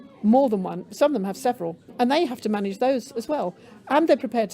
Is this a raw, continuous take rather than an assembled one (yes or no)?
no